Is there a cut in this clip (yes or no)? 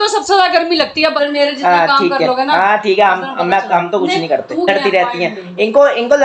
yes